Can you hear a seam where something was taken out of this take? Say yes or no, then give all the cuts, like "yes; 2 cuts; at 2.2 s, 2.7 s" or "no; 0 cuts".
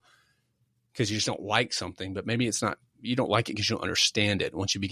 no; 0 cuts